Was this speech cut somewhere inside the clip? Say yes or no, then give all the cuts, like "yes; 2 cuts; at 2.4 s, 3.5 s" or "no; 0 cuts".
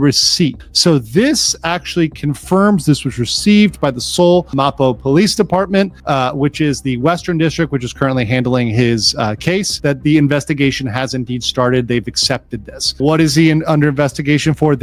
no; 0 cuts